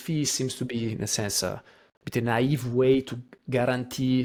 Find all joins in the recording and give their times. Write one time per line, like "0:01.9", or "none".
none